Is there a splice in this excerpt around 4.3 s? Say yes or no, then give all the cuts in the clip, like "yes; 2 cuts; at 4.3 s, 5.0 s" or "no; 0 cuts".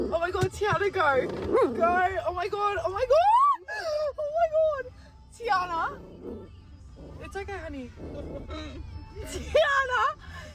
no; 0 cuts